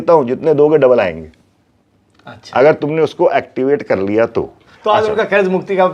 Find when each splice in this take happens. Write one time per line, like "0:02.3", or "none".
0:04.6